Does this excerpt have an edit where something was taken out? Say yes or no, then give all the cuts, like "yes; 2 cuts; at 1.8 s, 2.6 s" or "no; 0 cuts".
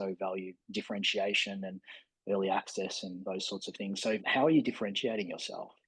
yes; 2 cuts; at 3.2 s, 4.2 s